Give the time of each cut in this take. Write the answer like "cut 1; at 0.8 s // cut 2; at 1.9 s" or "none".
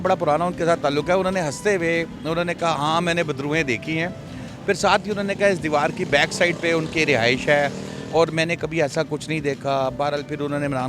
none